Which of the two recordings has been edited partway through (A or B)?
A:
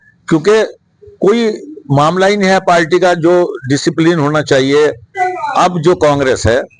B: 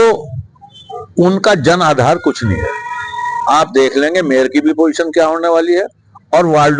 A